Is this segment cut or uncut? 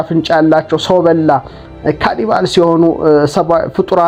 uncut